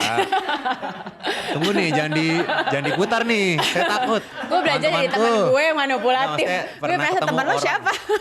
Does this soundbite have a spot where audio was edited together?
no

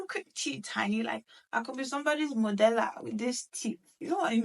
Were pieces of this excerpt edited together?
no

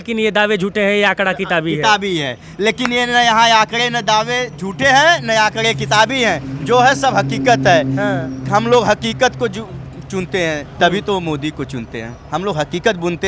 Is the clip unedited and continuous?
yes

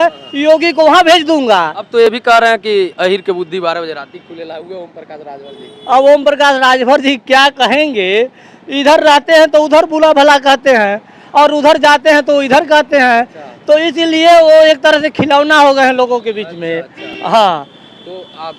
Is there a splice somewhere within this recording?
no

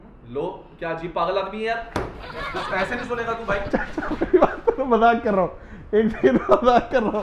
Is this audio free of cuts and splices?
yes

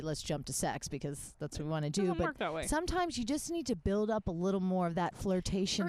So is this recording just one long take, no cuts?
yes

